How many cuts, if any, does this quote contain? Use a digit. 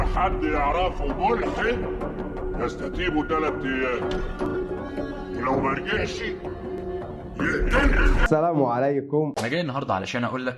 1